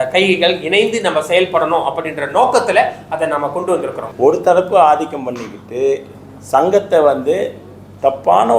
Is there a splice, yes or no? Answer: yes